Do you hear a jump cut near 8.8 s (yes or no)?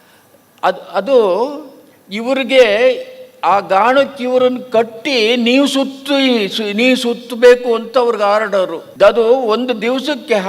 yes